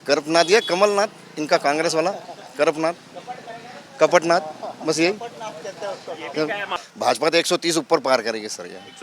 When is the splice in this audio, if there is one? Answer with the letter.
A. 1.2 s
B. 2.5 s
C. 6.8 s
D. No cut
C